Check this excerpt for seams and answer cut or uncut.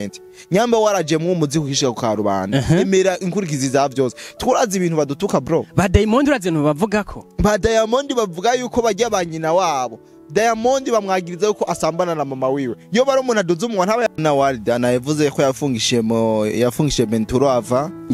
cut